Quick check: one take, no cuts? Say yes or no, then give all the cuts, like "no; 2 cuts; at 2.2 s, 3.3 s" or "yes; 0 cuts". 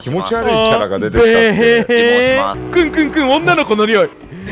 no; 1 cut; at 2.6 s